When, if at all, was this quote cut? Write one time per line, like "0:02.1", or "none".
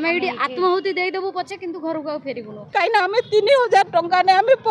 0:02.5